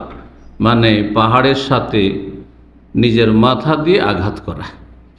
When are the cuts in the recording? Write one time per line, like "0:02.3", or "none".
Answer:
none